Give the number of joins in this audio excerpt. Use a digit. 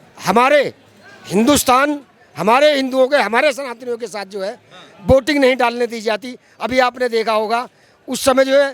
0